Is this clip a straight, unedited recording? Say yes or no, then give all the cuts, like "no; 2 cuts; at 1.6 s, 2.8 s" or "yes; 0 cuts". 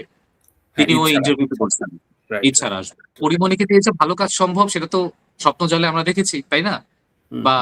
no; 1 cut; at 3.1 s